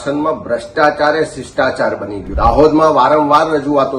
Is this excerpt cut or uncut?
cut